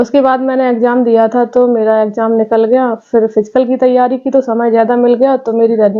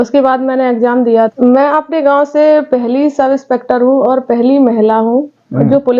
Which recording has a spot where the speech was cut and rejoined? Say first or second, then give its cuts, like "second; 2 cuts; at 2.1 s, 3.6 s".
second; 1 cut; at 1.3 s